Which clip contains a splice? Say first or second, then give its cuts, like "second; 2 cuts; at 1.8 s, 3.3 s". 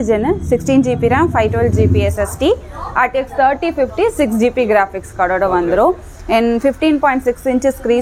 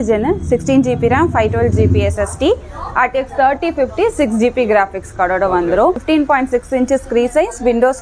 second; 1 cut; at 6.0 s